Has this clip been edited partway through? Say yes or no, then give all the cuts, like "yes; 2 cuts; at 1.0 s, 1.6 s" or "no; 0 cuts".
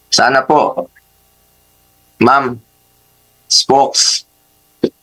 no; 0 cuts